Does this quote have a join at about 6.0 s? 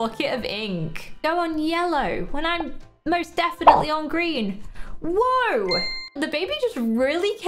yes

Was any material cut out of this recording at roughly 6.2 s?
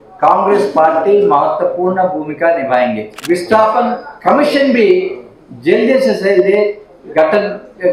no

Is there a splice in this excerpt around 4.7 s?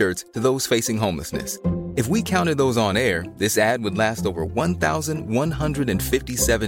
no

